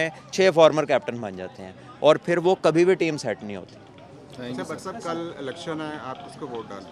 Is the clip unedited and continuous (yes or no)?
yes